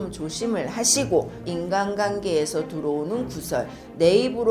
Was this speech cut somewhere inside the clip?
yes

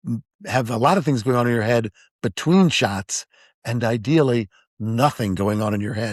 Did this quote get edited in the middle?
no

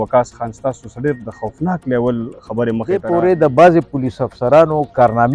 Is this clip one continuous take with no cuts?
no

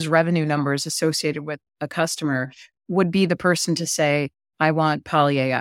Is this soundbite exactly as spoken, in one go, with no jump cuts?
yes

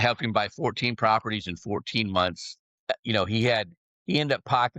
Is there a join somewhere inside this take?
yes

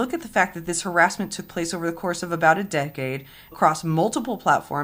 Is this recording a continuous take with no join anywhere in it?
no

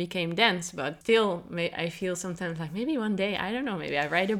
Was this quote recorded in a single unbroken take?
no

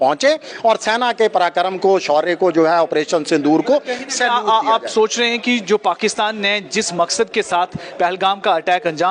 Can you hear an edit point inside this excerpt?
no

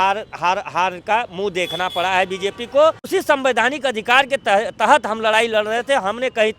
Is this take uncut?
no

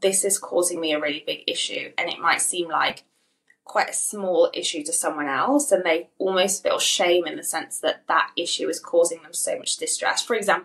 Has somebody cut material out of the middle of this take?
no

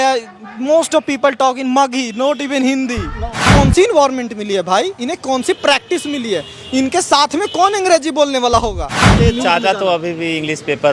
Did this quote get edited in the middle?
yes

